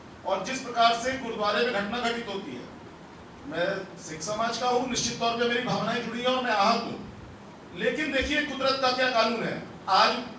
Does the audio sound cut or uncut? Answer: uncut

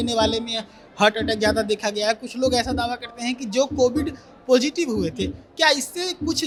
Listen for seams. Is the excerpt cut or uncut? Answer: uncut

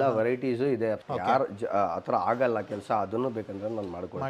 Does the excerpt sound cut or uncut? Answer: cut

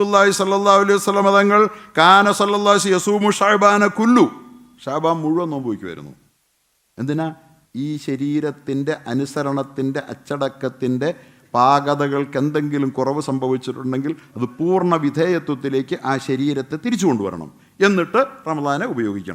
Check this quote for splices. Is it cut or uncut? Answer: uncut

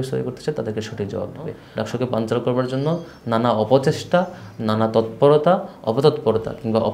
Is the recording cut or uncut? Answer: cut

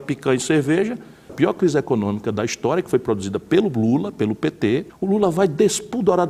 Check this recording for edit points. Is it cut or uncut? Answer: cut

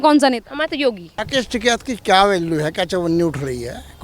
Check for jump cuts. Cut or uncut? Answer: cut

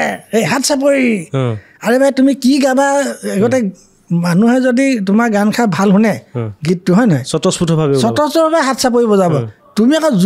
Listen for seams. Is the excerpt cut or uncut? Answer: uncut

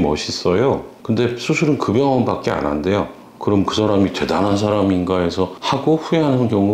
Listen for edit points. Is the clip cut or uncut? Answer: uncut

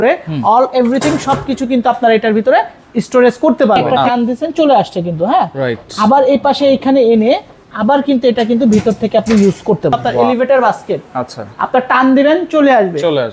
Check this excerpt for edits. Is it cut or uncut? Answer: cut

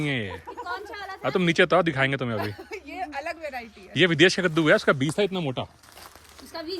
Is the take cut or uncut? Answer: uncut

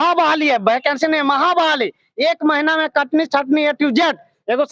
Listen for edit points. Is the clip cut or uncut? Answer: uncut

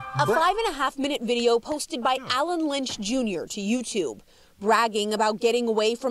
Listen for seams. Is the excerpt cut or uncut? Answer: cut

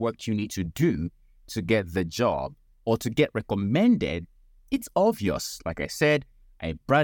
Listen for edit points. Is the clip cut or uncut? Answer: uncut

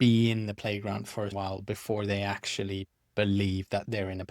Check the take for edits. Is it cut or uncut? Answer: cut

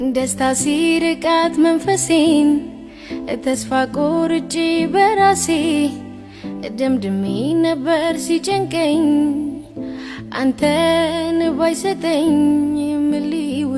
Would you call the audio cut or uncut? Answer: uncut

